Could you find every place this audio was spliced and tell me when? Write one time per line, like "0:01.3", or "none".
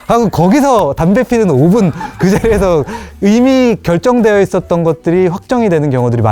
none

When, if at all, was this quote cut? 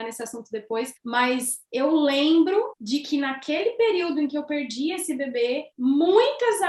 0:01.0
0:02.8
0:05.7

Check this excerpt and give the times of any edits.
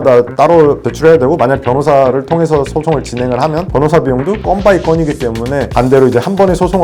0:05.7

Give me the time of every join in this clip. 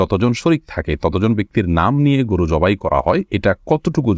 0:03.3

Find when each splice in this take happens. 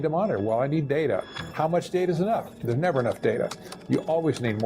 0:01.3
0:02.5

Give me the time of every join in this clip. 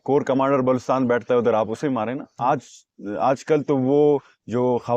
0:02.3

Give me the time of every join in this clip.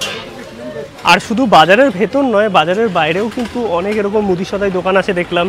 0:00.9

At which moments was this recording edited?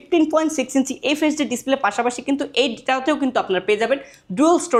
none

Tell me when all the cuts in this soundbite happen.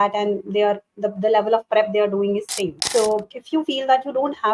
0:02.8
0:03.4

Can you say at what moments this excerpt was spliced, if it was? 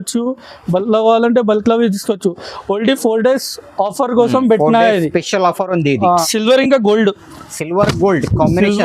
0:06.3

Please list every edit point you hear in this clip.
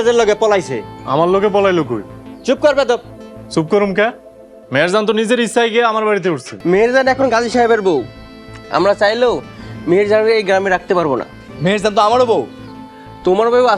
0:06.5

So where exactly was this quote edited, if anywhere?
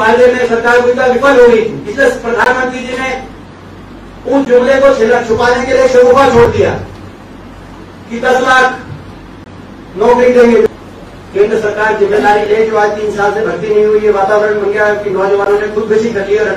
0:10.7

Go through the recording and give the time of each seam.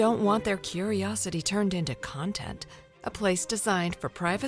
none

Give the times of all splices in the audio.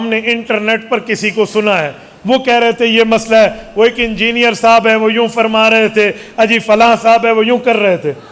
none

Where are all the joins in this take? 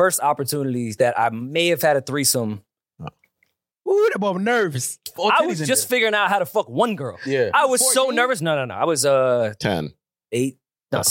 0:00.9
0:05.1

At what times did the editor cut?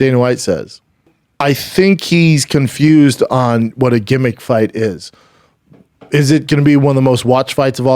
0:01.2

